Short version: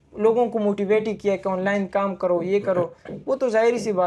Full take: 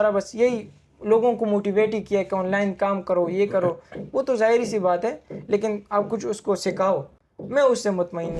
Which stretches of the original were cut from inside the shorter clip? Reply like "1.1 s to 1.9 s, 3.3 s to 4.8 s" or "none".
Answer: none